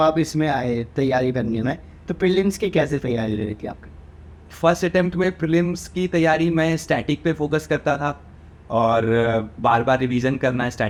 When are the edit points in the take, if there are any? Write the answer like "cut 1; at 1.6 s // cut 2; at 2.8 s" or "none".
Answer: none